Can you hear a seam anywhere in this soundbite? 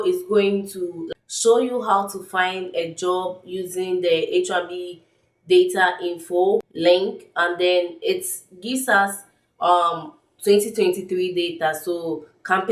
yes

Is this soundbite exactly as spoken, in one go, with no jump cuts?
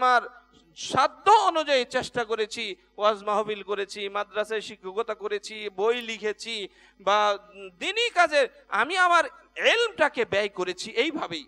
yes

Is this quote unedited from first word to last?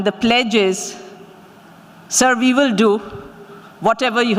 yes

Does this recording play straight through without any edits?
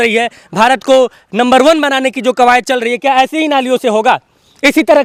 yes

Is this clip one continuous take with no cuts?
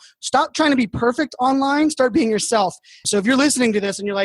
no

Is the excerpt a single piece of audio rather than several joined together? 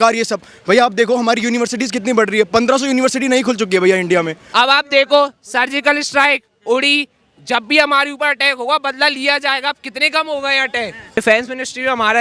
no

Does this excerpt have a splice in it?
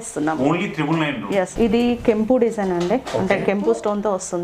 yes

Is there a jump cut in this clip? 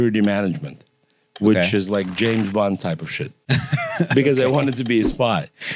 yes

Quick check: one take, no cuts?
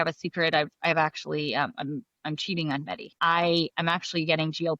no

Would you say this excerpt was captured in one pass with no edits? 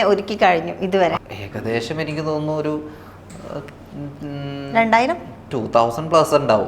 yes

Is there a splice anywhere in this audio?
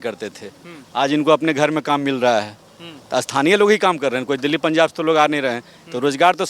no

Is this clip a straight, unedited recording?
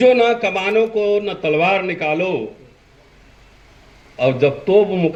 yes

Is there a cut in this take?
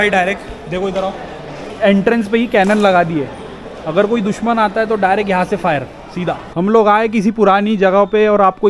yes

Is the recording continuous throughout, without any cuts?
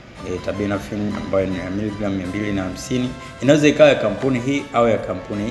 yes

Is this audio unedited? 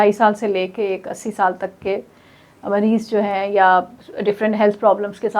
yes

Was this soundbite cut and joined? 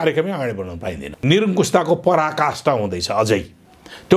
yes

